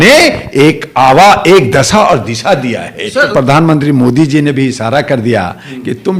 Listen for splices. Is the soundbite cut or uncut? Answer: cut